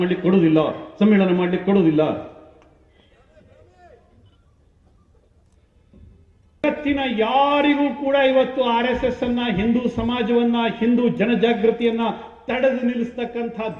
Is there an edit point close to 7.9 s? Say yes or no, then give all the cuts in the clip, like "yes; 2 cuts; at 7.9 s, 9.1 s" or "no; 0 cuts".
no; 1 cut; at 6.6 s